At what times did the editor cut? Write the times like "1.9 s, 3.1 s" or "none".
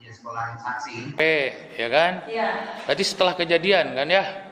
1.2 s